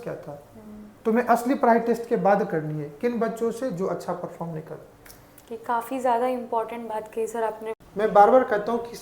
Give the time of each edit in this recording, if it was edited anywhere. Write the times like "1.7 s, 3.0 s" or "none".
7.8 s